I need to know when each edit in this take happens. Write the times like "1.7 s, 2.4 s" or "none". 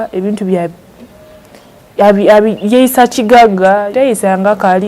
3.9 s